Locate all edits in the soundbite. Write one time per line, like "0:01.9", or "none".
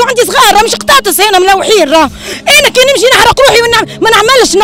0:02.3